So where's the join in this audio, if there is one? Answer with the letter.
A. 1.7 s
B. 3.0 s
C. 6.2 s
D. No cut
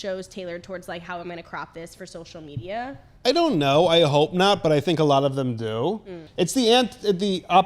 C